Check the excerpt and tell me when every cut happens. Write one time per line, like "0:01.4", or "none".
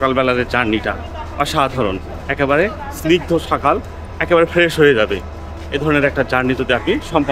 none